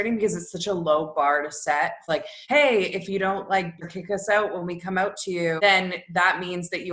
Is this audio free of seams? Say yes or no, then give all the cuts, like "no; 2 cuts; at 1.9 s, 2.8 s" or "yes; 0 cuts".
no; 3 cuts; at 2.2 s, 3.8 s, 5.6 s